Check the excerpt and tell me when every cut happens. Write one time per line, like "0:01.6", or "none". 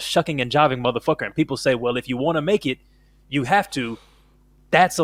none